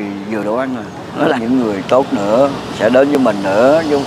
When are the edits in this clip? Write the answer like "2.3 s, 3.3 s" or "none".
1.4 s

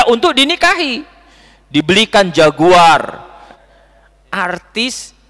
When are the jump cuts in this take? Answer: 3.6 s

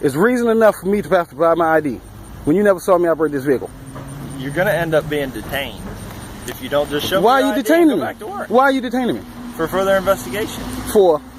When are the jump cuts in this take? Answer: none

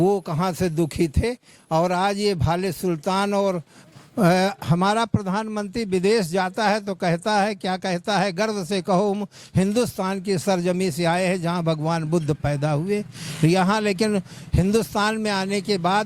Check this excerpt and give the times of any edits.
3.7 s

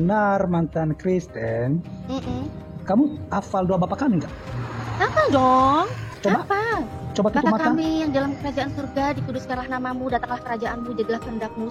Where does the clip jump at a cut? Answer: none

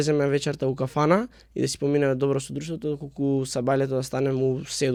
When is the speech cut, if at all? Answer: none

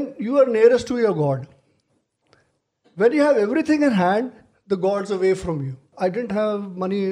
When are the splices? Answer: 5.9 s

